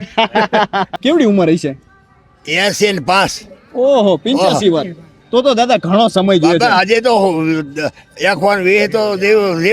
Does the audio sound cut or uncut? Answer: cut